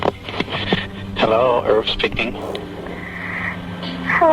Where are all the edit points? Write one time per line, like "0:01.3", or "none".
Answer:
0:01.0